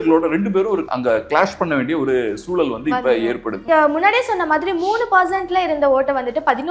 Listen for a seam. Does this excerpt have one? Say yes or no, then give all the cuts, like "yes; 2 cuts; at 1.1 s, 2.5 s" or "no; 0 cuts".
yes; 2 cuts; at 0.9 s, 3.6 s